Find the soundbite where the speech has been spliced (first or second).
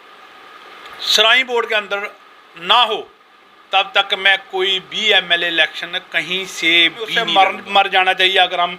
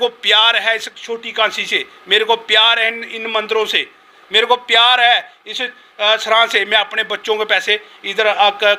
first